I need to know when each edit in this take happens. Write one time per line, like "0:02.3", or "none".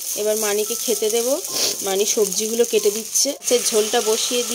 0:03.4